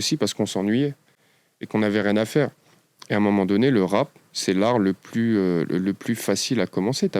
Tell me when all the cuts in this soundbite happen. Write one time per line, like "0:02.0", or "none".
none